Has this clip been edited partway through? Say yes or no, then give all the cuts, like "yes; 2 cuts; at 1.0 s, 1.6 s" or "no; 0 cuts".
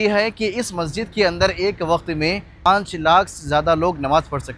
no; 0 cuts